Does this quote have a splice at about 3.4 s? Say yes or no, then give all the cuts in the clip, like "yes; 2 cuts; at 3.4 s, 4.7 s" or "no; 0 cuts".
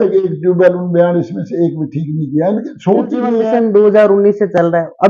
yes; 1 cut; at 3.4 s